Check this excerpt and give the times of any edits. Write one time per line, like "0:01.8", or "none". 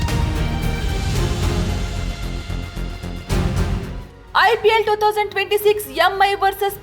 0:04.2